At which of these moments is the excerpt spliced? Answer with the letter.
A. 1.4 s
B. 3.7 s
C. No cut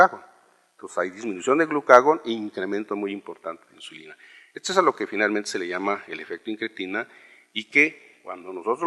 A